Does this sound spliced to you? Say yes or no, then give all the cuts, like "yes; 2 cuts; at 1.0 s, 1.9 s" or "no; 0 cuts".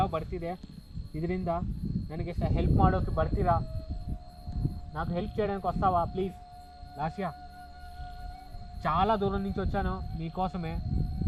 no; 0 cuts